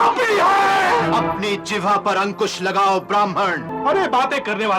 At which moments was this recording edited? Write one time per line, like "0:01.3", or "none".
0:01.0
0:03.6